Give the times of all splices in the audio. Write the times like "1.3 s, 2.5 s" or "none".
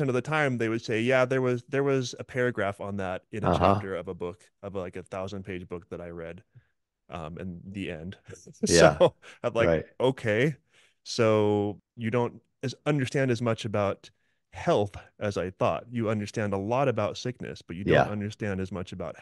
11.9 s

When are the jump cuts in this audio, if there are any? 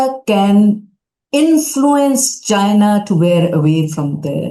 none

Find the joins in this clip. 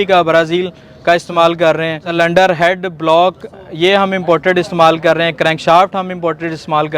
2.1 s

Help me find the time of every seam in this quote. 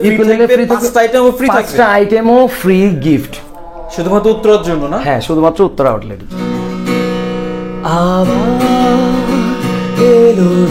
none

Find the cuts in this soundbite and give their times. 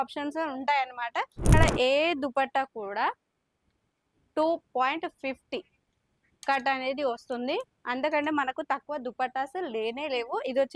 1.5 s

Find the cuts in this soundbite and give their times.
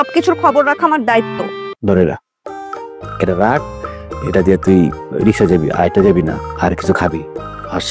1.6 s

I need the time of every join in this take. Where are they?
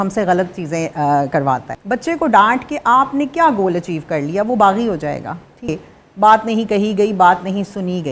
1.7 s, 5.7 s

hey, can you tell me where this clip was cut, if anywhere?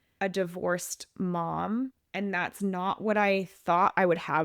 2.0 s

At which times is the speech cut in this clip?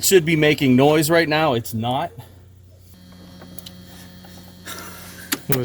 2.9 s

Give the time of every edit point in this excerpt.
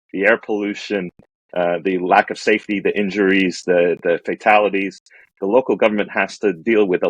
none

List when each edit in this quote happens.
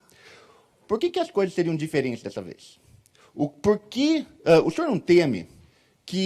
none

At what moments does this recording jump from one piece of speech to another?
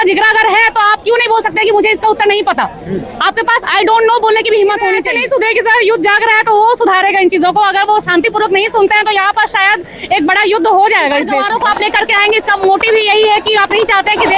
5.1 s, 11.4 s

